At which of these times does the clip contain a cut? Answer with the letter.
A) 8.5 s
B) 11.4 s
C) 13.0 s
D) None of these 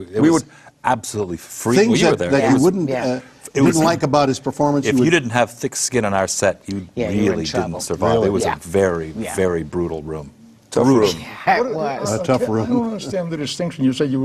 D